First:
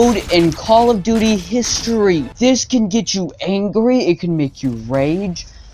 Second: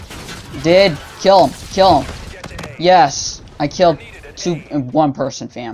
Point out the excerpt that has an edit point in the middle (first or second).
first